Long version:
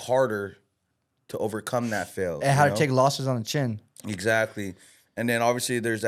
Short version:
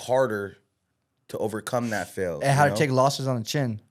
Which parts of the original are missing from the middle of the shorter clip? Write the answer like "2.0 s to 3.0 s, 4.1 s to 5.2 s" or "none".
none